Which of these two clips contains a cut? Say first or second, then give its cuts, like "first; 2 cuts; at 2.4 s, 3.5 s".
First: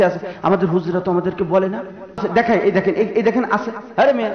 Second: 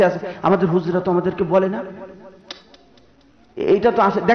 first; 1 cut; at 2.2 s